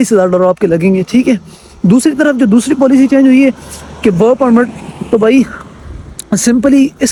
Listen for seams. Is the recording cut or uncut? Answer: uncut